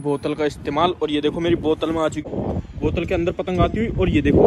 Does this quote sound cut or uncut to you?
cut